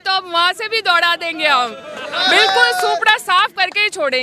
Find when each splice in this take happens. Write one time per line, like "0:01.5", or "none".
none